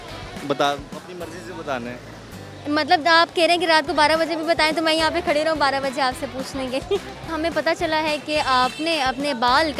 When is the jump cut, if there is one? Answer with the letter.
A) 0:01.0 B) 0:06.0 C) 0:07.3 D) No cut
C